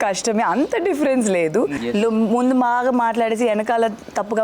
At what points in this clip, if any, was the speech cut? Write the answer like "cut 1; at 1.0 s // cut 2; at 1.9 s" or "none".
cut 1; at 1.8 s